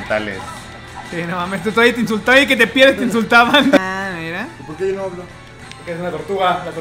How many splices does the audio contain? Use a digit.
1